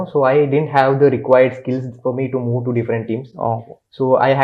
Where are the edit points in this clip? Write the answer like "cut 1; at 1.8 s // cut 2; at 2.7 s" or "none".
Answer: none